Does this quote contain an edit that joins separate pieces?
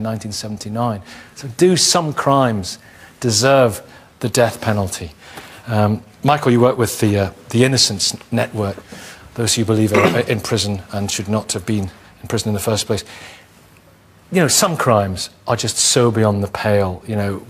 no; 0 cuts

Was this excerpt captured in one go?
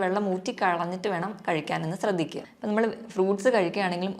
no; 1 cut; at 2.5 s

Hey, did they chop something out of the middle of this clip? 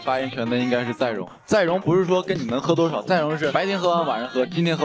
yes; 1 cut; at 3.5 s

